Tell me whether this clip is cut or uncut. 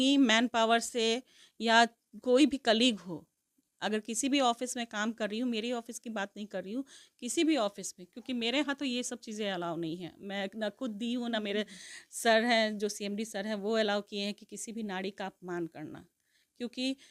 uncut